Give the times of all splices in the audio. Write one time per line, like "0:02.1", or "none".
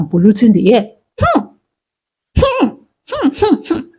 0:01.0

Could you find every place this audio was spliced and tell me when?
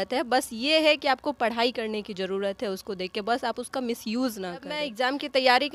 none

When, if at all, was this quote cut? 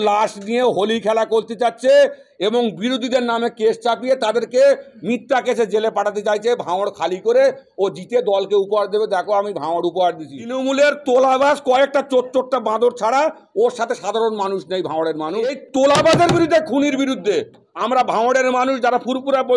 0:10.4
0:15.6

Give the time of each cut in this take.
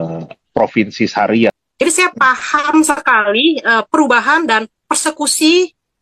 0:01.6

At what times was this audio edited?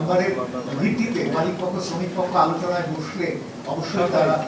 none

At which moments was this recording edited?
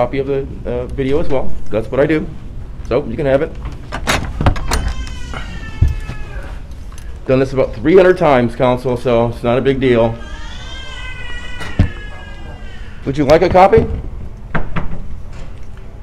none

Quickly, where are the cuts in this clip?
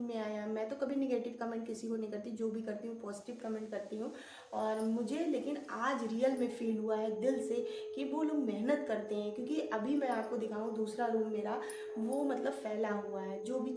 none

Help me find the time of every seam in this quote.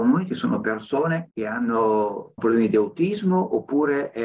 0:01.3
0:02.4

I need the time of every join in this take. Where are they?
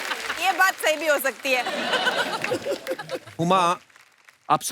0:03.1

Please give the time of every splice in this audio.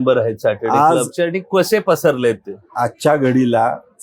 none

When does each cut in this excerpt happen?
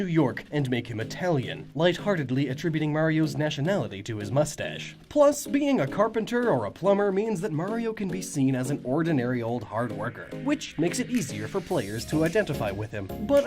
0:10.7

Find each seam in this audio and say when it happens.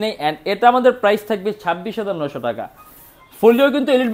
none

